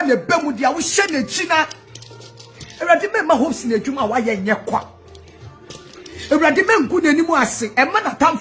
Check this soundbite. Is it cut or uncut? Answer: uncut